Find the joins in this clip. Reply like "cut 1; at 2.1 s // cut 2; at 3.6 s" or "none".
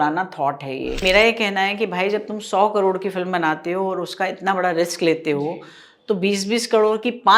cut 1; at 1.0 s